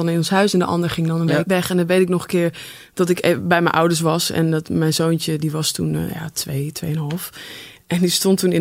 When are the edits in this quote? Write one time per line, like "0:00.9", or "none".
0:01.4